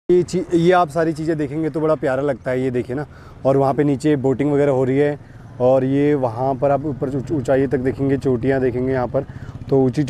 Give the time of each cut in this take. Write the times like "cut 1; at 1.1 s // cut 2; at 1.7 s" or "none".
none